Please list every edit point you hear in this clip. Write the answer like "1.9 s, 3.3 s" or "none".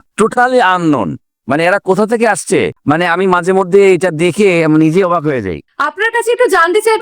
5.6 s